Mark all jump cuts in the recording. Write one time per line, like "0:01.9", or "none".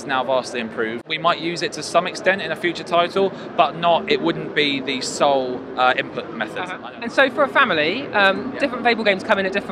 0:01.1
0:06.8